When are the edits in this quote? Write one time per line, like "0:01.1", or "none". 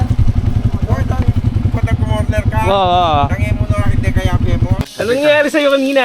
0:04.8